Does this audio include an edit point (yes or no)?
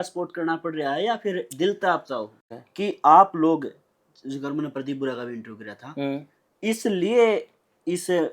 yes